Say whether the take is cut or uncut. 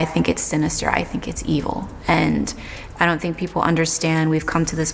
uncut